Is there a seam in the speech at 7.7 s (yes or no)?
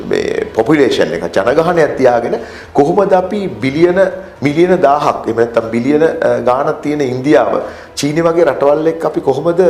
no